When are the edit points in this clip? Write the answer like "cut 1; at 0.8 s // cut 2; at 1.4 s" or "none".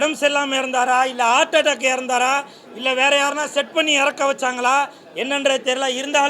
none

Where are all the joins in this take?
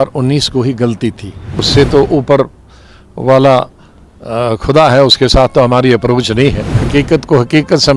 cut 1; at 1.6 s // cut 2; at 6.7 s

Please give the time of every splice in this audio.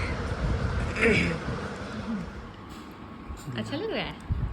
cut 1; at 2.0 s

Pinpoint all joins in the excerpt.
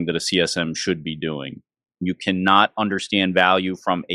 cut 1; at 2.0 s

